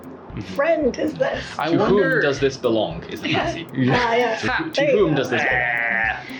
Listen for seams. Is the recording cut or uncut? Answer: uncut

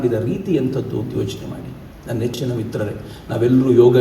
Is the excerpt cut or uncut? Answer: uncut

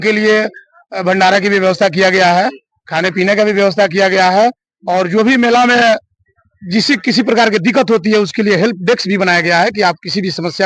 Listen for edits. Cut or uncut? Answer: uncut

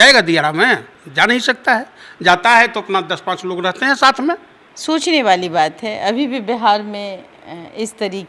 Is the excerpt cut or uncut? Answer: uncut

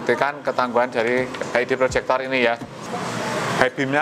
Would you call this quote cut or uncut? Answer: cut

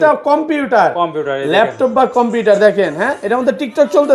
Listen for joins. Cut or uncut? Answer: uncut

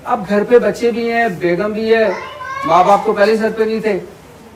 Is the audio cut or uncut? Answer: uncut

